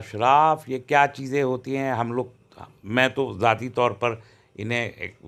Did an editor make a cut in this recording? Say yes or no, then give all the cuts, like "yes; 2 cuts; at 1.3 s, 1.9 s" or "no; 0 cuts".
no; 0 cuts